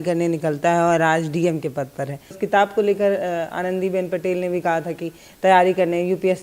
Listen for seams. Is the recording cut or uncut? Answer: cut